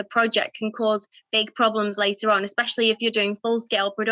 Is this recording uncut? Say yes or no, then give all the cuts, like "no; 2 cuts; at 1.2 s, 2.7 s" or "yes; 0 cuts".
yes; 0 cuts